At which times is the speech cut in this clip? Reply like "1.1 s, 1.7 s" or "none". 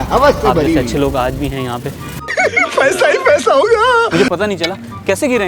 2.2 s